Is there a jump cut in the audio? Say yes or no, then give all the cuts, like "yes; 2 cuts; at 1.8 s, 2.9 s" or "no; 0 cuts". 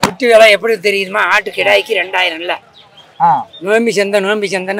no; 0 cuts